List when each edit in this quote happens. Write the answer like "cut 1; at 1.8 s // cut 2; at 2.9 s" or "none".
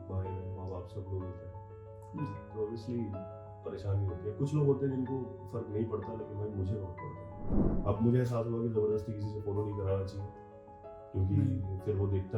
cut 1; at 7.6 s